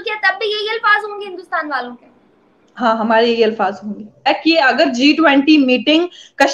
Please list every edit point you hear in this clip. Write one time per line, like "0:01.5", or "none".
0:04.3